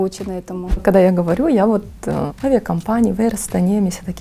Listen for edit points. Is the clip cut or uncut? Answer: cut